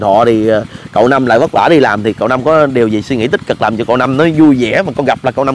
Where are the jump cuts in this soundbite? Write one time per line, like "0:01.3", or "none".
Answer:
none